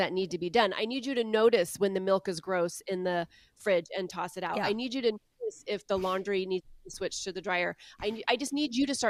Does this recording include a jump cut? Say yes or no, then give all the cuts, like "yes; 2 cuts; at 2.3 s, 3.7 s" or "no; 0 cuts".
no; 0 cuts